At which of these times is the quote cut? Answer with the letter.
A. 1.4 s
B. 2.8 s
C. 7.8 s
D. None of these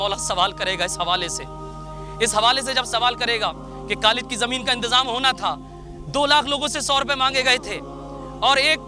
D